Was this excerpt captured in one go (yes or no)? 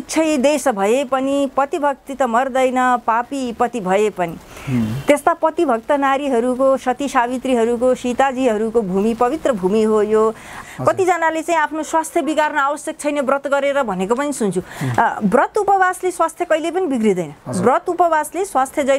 no